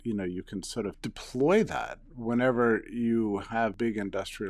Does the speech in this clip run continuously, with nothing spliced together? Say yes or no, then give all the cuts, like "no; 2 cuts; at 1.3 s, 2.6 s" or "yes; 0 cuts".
no; 2 cuts; at 1.0 s, 3.7 s